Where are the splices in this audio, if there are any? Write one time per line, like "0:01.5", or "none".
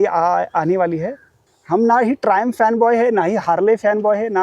0:01.5